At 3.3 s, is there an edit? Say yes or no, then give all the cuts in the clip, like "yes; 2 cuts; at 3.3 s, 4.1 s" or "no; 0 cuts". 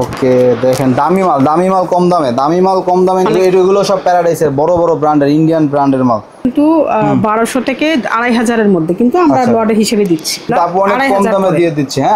yes; 3 cuts; at 3.3 s, 6.4 s, 10.5 s